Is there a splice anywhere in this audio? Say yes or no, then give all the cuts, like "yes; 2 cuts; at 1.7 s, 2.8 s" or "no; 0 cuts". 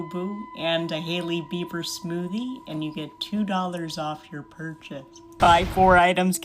yes; 1 cut; at 5.4 s